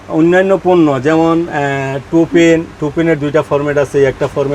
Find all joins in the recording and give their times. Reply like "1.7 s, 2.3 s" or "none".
none